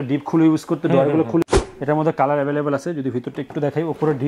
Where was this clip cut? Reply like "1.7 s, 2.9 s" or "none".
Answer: 1.4 s